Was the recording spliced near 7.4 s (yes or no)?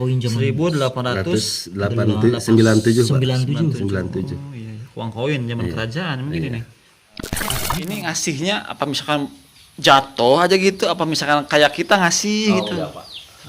yes